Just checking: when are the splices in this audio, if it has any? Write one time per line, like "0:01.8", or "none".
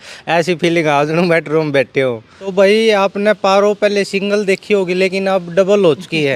0:02.3